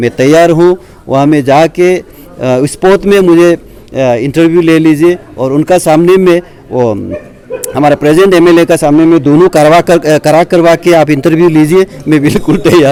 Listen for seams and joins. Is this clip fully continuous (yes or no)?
yes